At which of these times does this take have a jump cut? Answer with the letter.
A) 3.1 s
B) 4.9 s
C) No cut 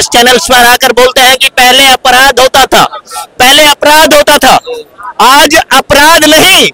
C